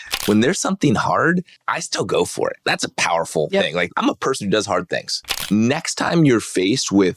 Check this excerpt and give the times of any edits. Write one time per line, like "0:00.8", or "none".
0:01.6
0:02.6
0:03.9
0:05.4